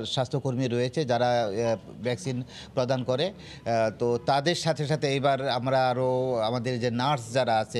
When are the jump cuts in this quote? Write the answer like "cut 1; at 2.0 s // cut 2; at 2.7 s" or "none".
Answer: none